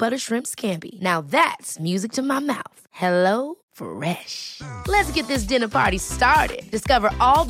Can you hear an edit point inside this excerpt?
no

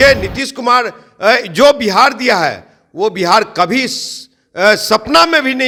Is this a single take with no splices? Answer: yes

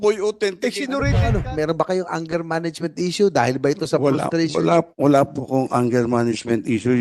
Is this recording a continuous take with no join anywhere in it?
no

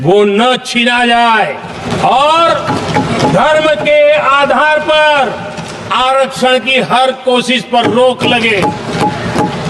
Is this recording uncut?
yes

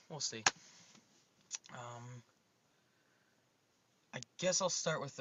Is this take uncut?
yes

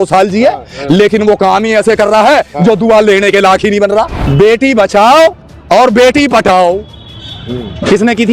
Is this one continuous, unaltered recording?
no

